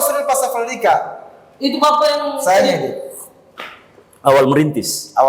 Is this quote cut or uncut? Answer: uncut